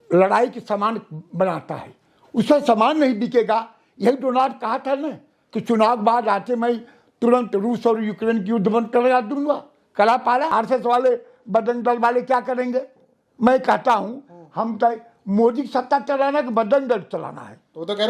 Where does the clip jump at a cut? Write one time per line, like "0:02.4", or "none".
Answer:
0:10.5